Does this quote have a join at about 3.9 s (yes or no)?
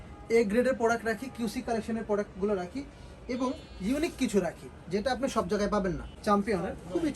no